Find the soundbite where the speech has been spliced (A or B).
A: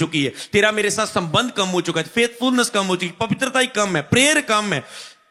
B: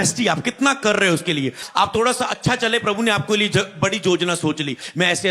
B